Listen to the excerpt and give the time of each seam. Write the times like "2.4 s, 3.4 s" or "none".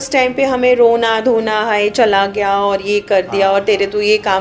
none